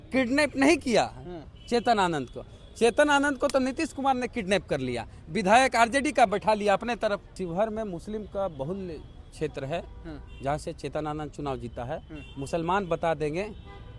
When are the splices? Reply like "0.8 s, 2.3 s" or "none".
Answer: 7.3 s